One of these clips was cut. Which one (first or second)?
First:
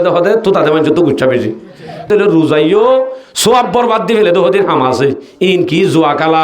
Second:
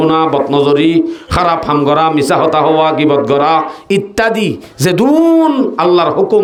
first